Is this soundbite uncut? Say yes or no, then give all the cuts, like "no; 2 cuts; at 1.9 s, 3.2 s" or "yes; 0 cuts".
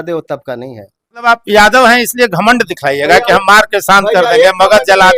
no; 1 cut; at 1.2 s